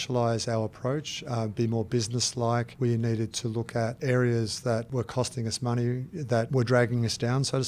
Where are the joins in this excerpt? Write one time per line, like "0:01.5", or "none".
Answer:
0:02.7
0:04.0
0:04.9
0:06.5